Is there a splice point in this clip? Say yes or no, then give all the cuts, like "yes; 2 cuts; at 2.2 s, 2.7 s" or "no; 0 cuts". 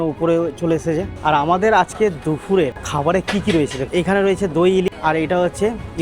yes; 4 cuts; at 1.1 s, 2.8 s, 3.8 s, 4.9 s